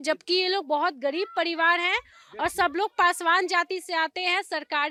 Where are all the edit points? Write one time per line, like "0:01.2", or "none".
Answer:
none